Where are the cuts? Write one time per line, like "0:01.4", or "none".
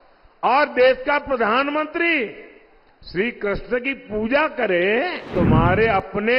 0:05.3